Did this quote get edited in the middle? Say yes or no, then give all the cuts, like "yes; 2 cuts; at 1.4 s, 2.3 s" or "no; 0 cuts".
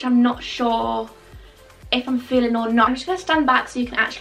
no; 0 cuts